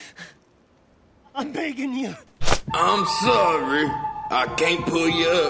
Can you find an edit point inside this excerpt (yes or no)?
yes